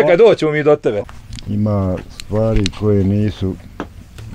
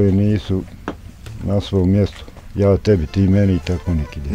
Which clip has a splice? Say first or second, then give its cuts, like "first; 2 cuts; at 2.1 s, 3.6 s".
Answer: first; 1 cut; at 1.1 s